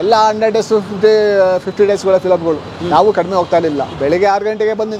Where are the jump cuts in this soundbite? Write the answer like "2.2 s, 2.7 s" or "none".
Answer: 3.9 s

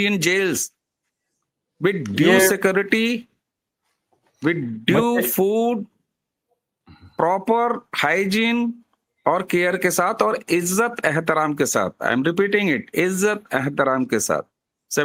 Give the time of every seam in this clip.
none

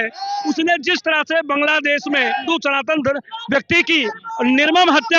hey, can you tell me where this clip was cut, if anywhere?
2.5 s

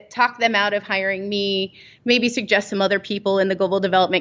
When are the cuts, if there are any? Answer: none

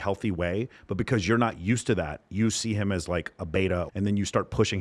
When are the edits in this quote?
3.9 s

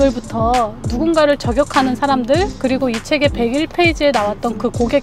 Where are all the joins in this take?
none

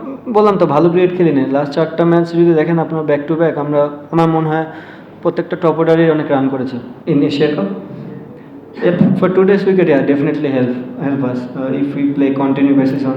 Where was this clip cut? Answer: 6.9 s

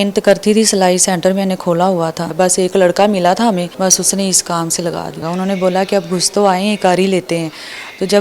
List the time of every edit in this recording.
2.3 s, 3.7 s, 5.2 s

